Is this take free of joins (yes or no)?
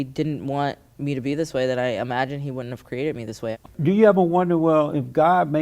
no